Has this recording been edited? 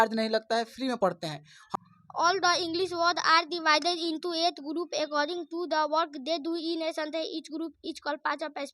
yes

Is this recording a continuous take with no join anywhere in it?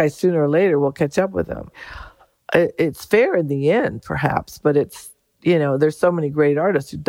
yes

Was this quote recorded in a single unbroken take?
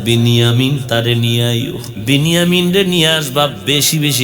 no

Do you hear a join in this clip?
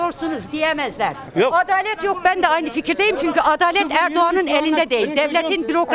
yes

